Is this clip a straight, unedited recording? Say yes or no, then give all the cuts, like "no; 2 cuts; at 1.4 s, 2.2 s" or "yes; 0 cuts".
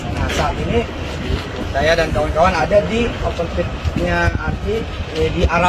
yes; 0 cuts